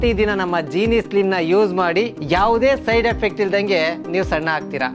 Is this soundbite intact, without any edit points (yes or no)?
yes